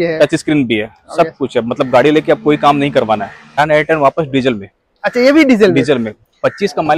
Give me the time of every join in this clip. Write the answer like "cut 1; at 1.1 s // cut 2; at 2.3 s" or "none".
cut 1; at 3.6 s